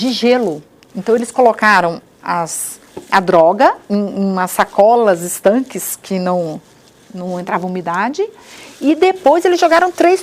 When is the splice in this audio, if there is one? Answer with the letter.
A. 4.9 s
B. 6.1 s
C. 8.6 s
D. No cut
D